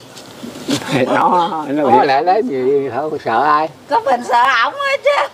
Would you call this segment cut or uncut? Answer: cut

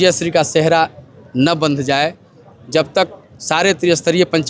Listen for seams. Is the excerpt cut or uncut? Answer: uncut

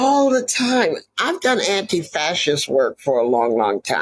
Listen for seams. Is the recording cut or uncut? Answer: cut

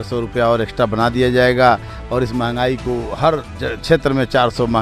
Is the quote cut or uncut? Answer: uncut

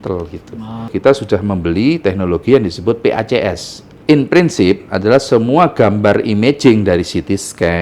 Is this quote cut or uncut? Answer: cut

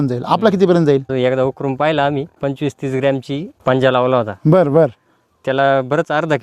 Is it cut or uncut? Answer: cut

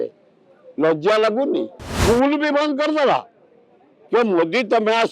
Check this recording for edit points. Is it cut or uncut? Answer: cut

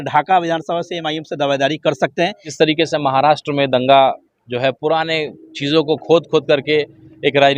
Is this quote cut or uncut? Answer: cut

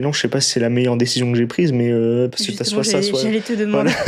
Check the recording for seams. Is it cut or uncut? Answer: uncut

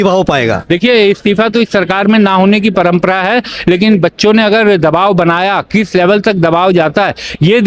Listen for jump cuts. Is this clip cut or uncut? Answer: uncut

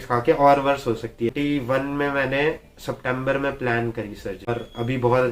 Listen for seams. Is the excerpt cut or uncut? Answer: cut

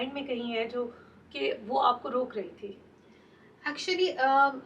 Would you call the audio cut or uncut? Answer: uncut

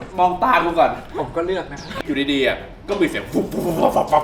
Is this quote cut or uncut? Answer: cut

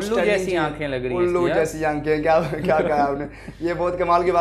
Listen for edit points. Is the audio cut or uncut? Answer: uncut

